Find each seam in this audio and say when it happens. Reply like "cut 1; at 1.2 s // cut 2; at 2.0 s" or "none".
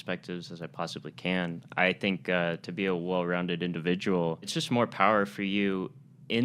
cut 1; at 4.5 s